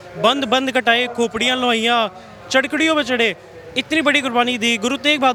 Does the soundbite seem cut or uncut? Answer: uncut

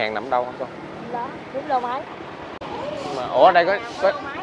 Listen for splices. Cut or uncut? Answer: cut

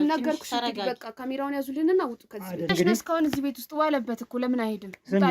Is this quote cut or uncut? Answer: cut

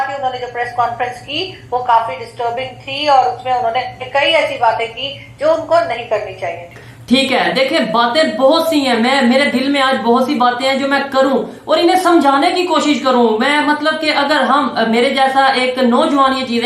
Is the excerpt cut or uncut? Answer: uncut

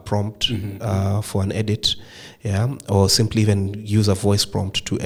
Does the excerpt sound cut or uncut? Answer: uncut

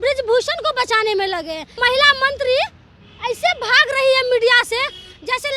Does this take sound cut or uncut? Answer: cut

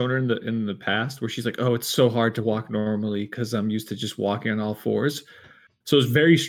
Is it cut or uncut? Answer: uncut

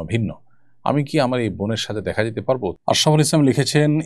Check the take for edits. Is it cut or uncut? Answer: cut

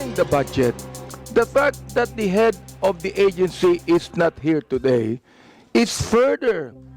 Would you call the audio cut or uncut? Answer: uncut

